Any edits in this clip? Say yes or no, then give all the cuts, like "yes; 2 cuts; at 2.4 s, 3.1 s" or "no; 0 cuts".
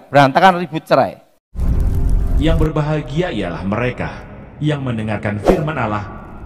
yes; 1 cut; at 1.5 s